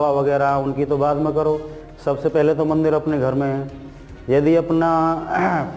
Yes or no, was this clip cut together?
no